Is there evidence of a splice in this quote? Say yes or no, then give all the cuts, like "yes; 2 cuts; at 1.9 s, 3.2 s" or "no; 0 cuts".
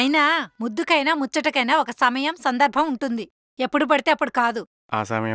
no; 0 cuts